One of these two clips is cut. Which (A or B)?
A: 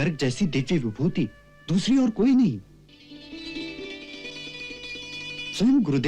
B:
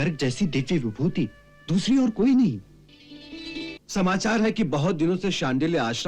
B